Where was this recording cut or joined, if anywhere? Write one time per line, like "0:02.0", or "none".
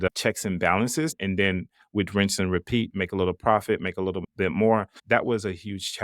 0:01.2
0:05.0